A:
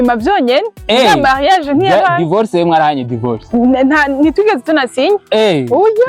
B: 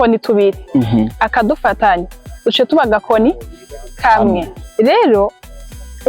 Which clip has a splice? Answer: B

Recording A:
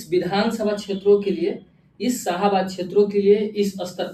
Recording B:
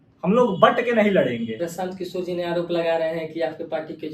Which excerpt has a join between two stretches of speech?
B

